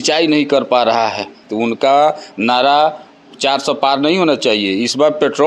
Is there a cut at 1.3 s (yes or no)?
yes